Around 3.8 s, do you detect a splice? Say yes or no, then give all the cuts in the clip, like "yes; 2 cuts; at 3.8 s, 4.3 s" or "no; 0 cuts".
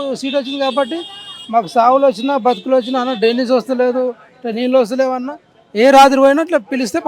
no; 0 cuts